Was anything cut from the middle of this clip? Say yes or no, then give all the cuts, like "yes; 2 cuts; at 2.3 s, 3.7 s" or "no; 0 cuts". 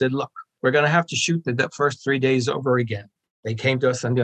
yes; 1 cut; at 3.2 s